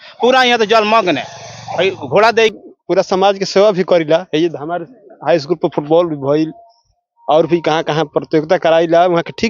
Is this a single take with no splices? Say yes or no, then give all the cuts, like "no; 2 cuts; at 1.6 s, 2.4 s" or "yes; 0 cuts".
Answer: no; 1 cut; at 2.5 s